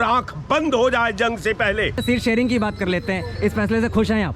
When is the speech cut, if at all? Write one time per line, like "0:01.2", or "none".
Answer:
0:02.0